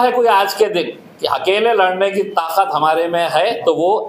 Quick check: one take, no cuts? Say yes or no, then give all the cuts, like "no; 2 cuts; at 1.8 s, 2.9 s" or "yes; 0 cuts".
yes; 0 cuts